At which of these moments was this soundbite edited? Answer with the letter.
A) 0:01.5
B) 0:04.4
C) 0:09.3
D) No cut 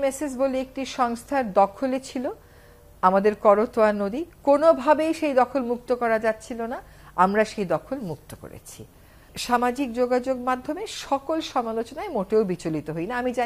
C